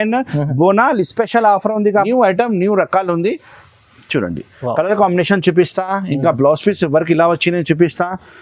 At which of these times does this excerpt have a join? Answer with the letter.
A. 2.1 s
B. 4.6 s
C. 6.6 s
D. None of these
A